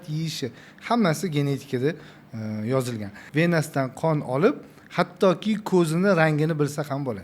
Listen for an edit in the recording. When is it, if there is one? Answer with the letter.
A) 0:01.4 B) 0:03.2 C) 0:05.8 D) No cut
B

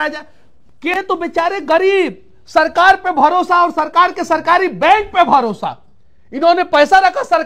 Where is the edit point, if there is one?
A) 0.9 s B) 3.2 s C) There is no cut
A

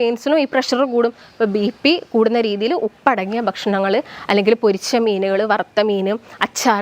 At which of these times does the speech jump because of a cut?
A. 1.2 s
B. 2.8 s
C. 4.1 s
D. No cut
D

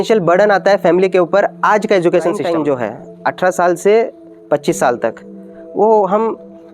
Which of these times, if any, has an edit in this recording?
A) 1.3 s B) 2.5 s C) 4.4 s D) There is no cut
B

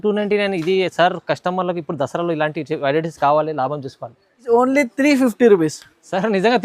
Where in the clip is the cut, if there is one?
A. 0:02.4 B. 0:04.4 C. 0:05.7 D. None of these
B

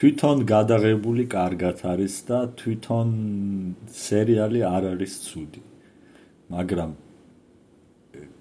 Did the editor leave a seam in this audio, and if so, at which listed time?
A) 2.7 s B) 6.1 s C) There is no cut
C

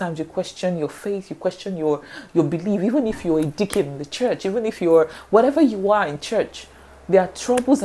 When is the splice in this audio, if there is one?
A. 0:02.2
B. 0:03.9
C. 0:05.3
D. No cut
D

